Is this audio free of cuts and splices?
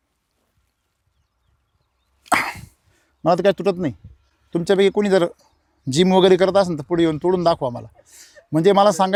yes; 0 cuts

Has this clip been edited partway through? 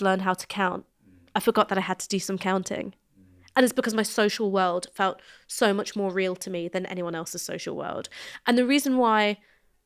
no; 0 cuts

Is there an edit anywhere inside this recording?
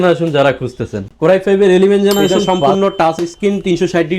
yes; 1 cut; at 2.4 s

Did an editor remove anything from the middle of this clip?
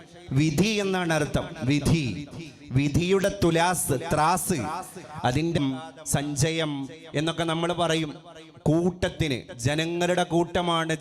yes; 1 cut; at 5.6 s

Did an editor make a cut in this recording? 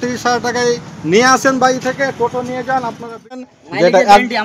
yes; 1 cut; at 3.5 s

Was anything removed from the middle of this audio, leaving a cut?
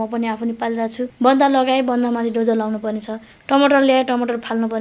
yes; 1 cut; at 1.1 s

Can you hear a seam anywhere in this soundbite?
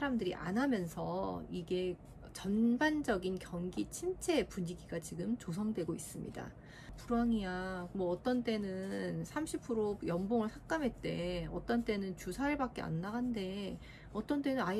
yes; 1 cut; at 7.0 s

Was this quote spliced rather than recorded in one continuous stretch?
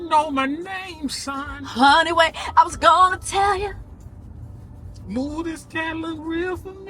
no; 0 cuts

